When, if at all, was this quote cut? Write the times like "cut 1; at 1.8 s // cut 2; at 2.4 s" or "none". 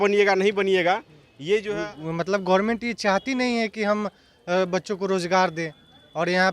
cut 1; at 1.7 s